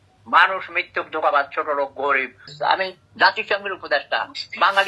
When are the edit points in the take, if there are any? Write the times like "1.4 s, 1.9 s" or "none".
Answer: 2.5 s